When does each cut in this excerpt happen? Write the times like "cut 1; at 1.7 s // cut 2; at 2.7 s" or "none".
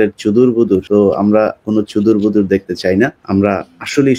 cut 1; at 0.8 s // cut 2; at 3.2 s